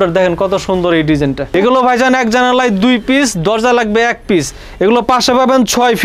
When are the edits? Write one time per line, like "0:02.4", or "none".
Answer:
0:01.5